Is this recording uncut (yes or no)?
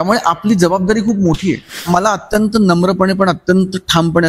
no